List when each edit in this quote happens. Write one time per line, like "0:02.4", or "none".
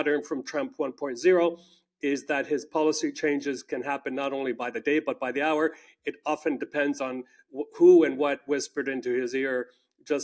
none